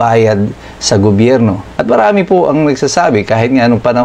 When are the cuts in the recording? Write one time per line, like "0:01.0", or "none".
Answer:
0:01.6